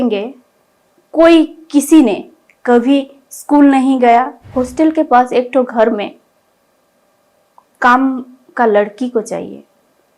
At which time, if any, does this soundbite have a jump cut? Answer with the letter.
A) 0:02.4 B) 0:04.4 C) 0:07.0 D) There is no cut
B